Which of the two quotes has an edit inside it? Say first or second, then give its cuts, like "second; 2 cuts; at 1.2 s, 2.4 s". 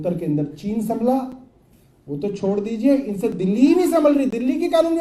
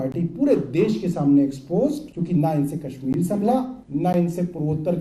second; 2 cuts; at 2.1 s, 3.8 s